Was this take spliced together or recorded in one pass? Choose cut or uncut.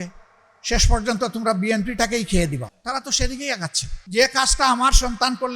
cut